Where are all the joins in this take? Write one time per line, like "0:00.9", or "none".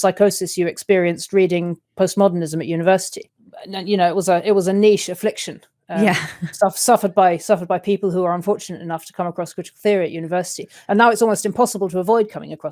none